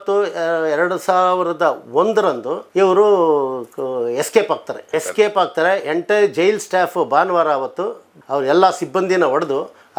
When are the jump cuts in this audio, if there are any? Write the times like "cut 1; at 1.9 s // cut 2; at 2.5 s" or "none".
none